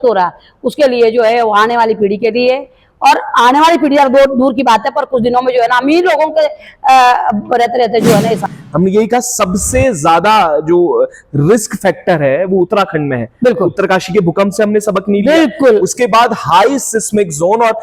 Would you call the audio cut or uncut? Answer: cut